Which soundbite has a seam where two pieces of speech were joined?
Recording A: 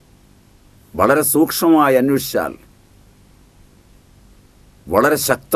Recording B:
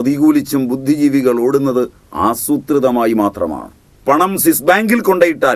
B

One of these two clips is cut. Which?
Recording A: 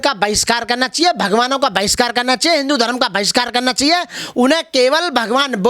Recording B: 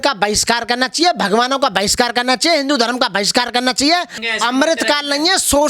B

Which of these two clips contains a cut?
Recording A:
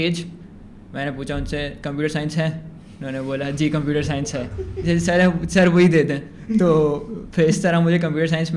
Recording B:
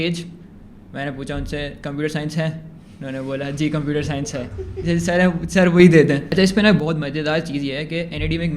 B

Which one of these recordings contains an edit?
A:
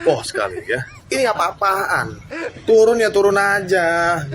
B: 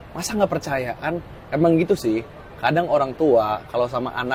A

